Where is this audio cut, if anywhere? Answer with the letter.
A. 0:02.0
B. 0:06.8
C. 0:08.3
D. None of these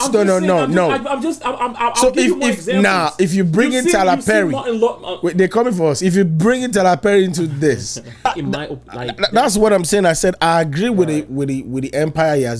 C